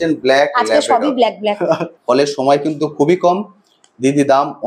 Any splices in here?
yes; 1 cut; at 1.9 s

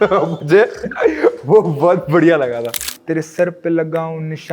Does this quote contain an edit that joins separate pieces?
yes; 1 cut; at 2.9 s

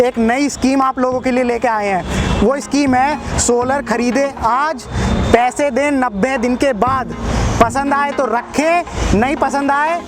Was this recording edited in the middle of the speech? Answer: no; 0 cuts

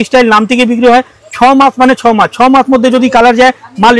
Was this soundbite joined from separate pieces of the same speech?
no; 0 cuts

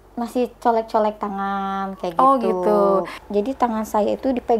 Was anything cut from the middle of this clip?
yes; 1 cut; at 3.1 s

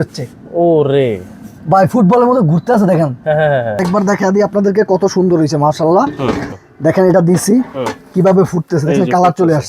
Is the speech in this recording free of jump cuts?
no; 2 cuts; at 3.8 s, 6.5 s

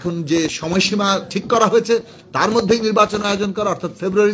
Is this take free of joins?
yes; 0 cuts

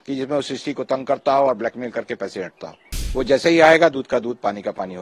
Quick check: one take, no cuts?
no; 1 cut; at 3.0 s

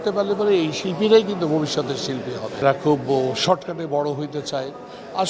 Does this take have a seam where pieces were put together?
yes; 1 cut; at 2.6 s

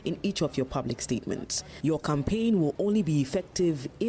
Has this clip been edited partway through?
yes; 1 cut; at 1.6 s

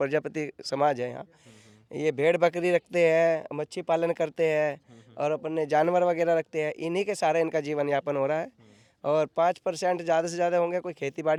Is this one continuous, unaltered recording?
yes; 0 cuts

